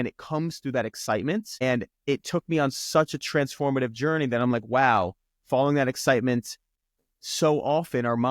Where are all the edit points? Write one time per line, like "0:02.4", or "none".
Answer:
0:01.5
0:06.7